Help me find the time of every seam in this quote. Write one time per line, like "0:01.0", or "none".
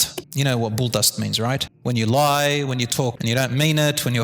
0:01.7
0:03.2